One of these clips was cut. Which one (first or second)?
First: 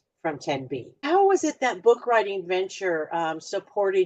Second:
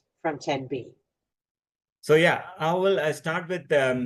first